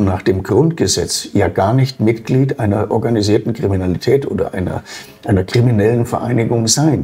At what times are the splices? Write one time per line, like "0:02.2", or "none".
0:02.9